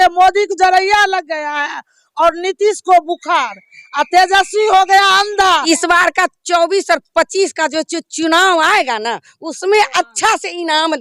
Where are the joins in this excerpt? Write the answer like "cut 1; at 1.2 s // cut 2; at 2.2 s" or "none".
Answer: cut 1; at 5.6 s